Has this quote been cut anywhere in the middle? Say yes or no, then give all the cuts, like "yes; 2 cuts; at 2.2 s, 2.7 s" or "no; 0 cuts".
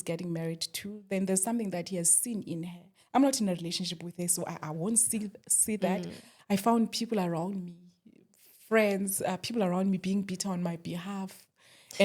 yes; 1 cut; at 6.3 s